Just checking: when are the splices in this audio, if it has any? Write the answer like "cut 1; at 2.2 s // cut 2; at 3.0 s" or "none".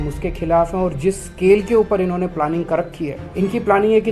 cut 1; at 3.2 s